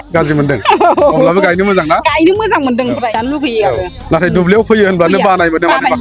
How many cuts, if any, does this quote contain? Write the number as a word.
one